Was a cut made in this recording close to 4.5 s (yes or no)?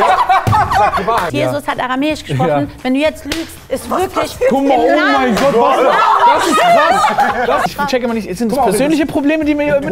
no